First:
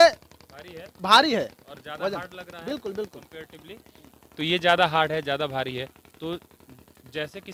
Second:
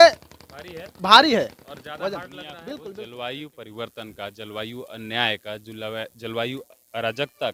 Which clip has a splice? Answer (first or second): second